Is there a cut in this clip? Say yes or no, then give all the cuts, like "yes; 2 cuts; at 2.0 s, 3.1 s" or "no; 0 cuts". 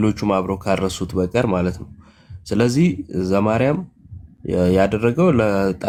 no; 0 cuts